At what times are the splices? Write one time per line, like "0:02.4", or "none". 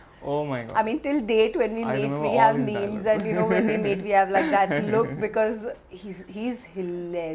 none